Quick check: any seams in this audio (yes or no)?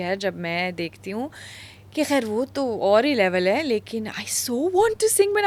no